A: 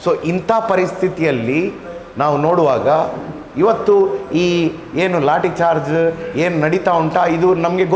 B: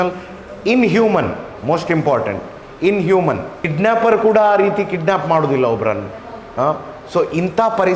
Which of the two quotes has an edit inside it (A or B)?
B